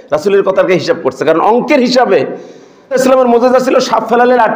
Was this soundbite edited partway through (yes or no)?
yes